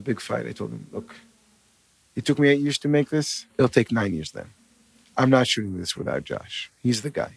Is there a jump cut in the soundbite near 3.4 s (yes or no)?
yes